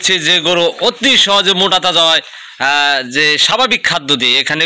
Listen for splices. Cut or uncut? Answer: uncut